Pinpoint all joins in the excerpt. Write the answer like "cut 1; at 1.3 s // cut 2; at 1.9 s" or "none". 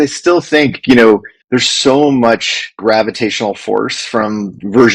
cut 1; at 1.3 s // cut 2; at 2.8 s